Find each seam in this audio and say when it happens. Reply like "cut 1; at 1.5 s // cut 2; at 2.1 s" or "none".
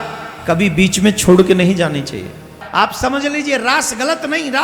cut 1; at 2.6 s